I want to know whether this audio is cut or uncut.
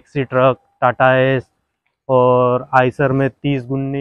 uncut